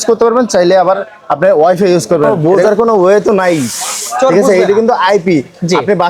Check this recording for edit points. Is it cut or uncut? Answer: cut